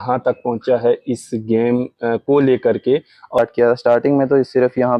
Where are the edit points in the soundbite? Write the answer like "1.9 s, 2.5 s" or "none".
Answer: 3.4 s